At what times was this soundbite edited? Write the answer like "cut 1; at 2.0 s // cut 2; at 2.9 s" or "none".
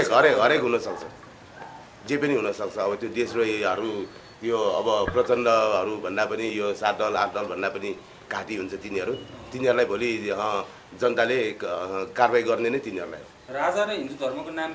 none